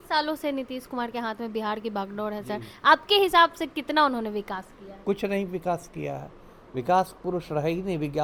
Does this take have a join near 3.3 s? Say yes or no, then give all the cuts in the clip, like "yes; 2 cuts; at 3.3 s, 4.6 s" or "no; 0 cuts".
no; 0 cuts